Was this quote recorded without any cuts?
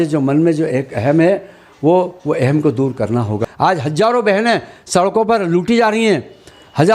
no; 1 cut; at 3.4 s

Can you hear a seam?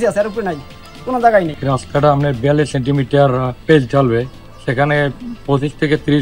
yes; 1 cut; at 1.6 s

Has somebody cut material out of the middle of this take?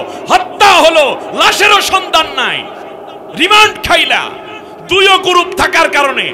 no; 0 cuts

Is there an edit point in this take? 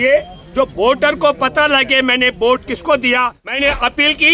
yes; 1 cut; at 3.4 s

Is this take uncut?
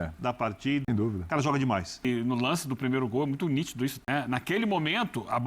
no; 3 cuts; at 0.9 s, 2.0 s, 4.0 s

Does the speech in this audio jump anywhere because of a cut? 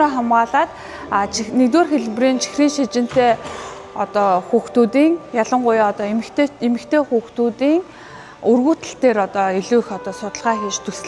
no; 0 cuts

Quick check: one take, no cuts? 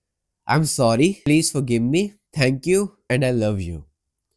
no; 3 cuts; at 1.2 s, 2.2 s, 3.0 s

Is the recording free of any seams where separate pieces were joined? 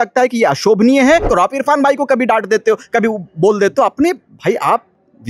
no; 1 cut; at 1.3 s

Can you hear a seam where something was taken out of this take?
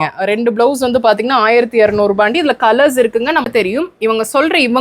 yes; 1 cut; at 3.5 s

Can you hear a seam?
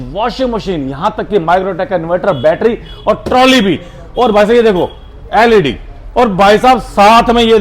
no; 0 cuts

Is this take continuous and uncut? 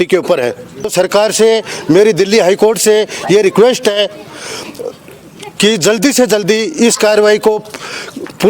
no; 1 cut; at 0.9 s

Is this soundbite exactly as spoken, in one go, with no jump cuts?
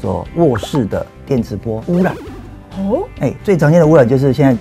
yes; 0 cuts

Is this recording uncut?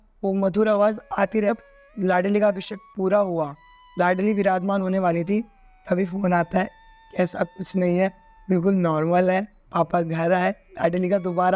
no; 1 cut; at 1.5 s

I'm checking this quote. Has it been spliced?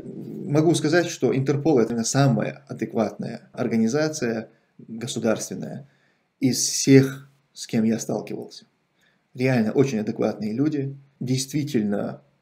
yes; 3 cuts; at 1.9 s, 3.5 s, 11.1 s

